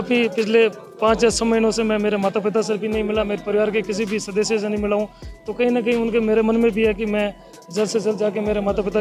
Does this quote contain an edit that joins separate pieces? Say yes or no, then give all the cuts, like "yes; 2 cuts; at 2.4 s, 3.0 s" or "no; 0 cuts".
no; 0 cuts